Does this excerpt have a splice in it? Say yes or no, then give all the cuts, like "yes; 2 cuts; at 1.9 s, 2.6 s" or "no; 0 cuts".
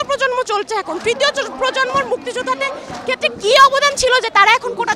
no; 0 cuts